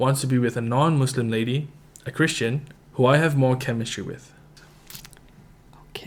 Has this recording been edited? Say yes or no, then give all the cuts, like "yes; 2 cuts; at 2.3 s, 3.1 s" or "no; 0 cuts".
yes; 1 cut; at 4.4 s